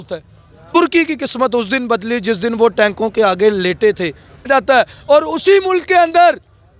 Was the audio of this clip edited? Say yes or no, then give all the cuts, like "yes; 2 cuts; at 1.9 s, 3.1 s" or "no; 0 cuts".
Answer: yes; 2 cuts; at 0.8 s, 4.5 s